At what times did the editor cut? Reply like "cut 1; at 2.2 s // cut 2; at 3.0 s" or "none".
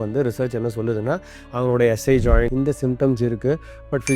cut 1; at 2.5 s